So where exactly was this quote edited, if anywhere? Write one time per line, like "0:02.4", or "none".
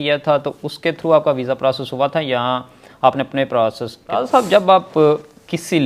0:04.2